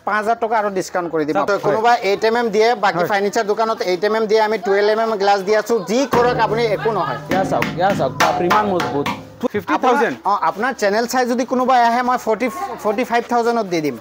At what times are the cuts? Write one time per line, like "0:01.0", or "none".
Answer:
0:01.5
0:09.4